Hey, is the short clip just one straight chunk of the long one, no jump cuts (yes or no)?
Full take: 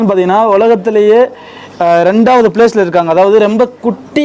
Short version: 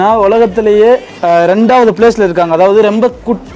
no